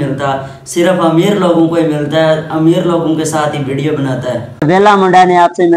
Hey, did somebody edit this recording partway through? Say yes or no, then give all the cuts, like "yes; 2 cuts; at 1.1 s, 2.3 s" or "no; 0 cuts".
yes; 1 cut; at 4.5 s